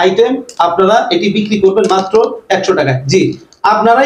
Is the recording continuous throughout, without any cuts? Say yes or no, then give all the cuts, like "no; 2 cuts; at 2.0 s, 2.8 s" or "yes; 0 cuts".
yes; 0 cuts